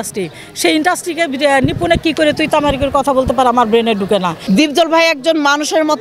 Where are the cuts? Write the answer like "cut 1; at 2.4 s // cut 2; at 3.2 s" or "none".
cut 1; at 4.4 s